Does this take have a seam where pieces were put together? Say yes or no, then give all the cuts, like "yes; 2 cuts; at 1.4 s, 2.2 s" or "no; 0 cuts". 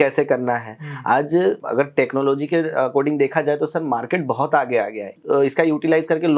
yes; 2 cuts; at 1.6 s, 5.2 s